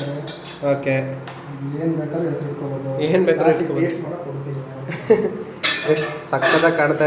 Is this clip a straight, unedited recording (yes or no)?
yes